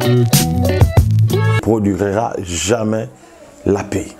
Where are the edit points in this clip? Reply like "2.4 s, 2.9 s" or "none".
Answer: 1.6 s